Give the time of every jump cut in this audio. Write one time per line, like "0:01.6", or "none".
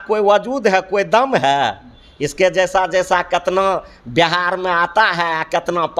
none